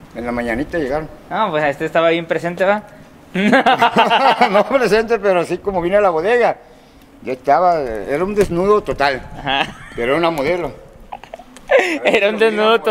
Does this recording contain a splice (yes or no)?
no